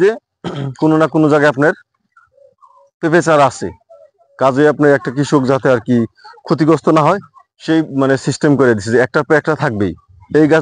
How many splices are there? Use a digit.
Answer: 0